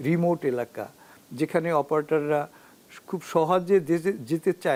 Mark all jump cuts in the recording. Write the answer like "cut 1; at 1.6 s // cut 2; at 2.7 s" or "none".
none